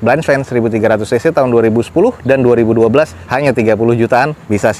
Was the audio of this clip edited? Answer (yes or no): no